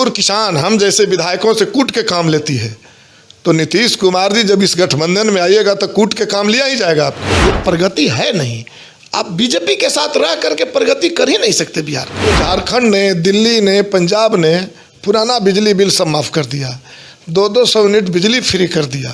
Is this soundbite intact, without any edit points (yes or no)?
no